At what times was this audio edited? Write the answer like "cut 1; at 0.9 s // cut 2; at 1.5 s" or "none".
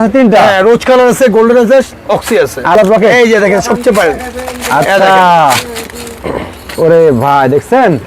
cut 1; at 2.8 s